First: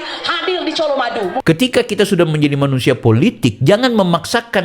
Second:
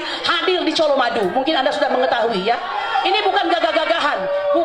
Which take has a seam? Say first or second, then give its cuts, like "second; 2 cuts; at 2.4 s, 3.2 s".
first; 1 cut; at 1.4 s